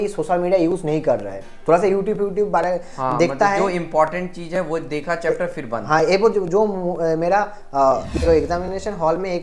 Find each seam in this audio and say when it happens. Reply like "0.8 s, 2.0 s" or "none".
8.3 s